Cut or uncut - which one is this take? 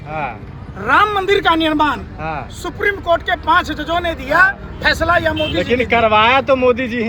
uncut